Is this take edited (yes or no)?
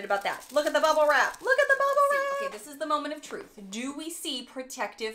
yes